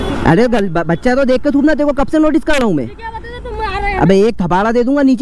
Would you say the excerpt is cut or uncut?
cut